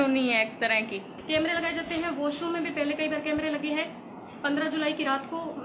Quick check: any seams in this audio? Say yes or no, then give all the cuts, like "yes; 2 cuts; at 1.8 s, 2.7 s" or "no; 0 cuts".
yes; 1 cut; at 1.1 s